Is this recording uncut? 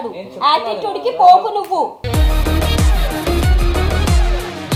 yes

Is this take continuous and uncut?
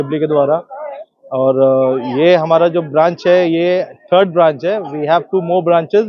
yes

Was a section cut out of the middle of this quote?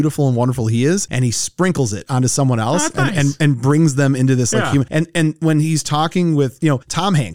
no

